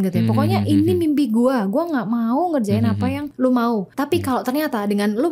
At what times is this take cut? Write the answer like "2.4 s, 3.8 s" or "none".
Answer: 3.3 s, 3.9 s